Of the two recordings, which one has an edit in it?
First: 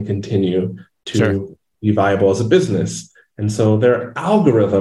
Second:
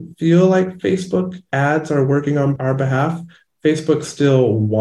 second; 2 cuts; at 1.4 s, 2.6 s

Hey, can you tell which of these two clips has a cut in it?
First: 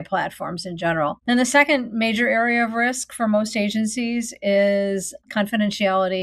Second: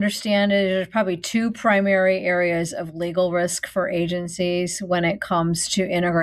first; 2 cuts; at 1.2 s, 5.2 s

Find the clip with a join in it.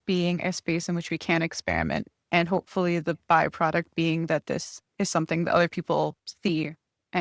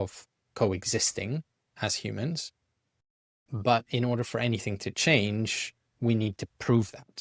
first; 2 cuts; at 4.8 s, 6.3 s

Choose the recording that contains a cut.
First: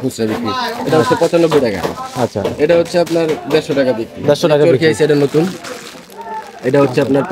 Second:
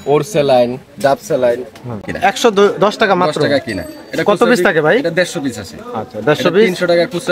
second; 1 cut; at 2.0 s

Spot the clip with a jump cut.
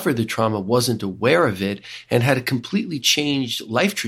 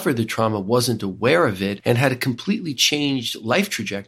second; 1 cut; at 1.8 s

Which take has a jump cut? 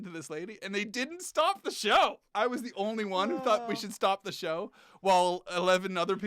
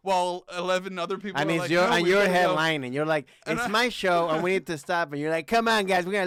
first; 1 cut; at 2.2 s

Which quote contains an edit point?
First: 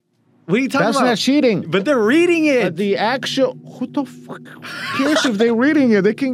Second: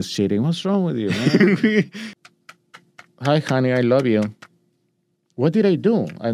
second; 1 cut; at 2.1 s

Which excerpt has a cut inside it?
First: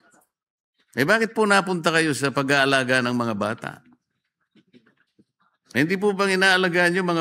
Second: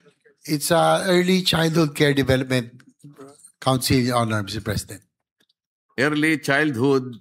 first; 1 cut; at 5.0 s

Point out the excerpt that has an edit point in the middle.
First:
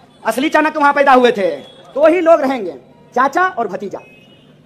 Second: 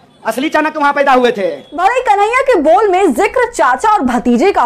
first; 1 cut; at 1.7 s

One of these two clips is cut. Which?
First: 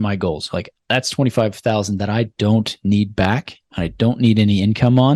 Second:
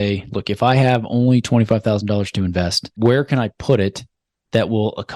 second; 1 cut; at 2.8 s

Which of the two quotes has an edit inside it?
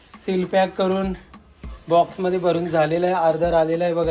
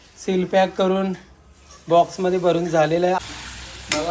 second; 1 cut; at 3.2 s

